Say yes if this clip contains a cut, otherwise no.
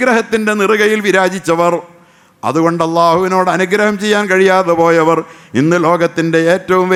no